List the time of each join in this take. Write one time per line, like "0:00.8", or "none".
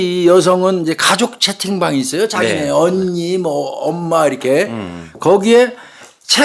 none